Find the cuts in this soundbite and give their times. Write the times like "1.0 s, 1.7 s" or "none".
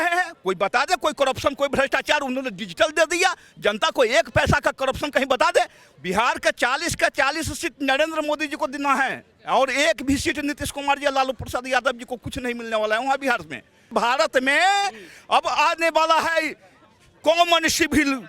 5.9 s, 13.8 s

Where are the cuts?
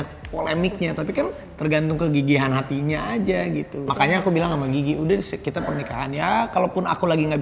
3.9 s

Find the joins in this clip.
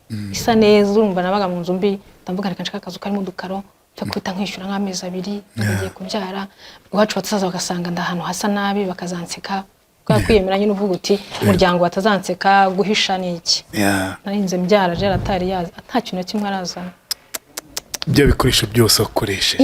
14.2 s

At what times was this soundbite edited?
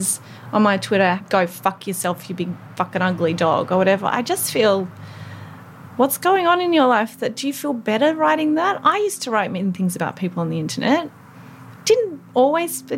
1.2 s

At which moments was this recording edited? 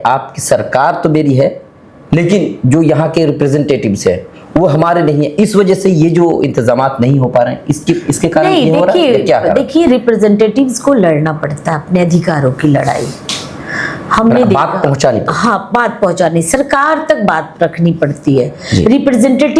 none

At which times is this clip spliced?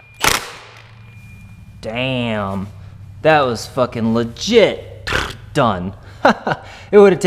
none

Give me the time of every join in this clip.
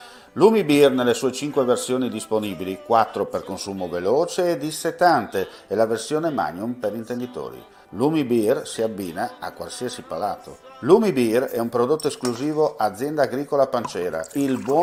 none

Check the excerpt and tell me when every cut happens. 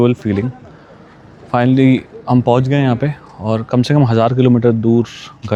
none

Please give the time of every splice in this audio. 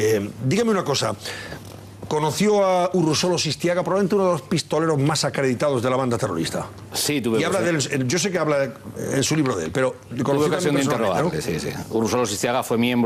11.7 s

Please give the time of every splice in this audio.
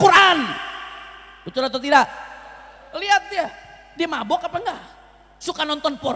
none

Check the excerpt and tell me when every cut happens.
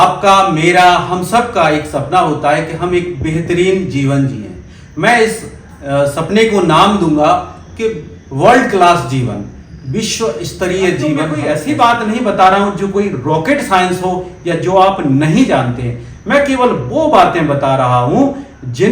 11.4 s

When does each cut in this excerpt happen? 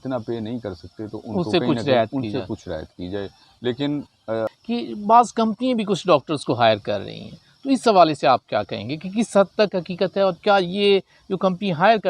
4.5 s

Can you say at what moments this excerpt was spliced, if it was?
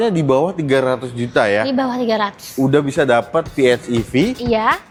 none

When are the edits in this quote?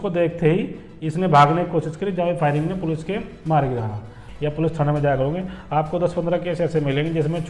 4.2 s

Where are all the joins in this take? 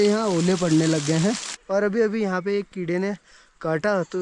1.5 s

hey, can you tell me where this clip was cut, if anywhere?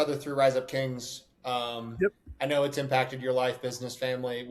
none

